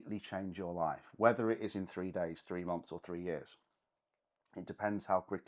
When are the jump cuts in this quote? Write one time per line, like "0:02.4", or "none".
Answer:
none